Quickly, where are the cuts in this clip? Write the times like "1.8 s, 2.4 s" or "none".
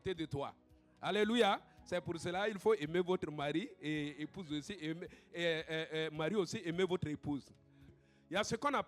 8.0 s